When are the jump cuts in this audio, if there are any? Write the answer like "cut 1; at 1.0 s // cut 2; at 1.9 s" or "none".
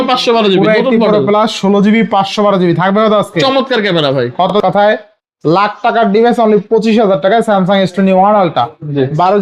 cut 1; at 4.5 s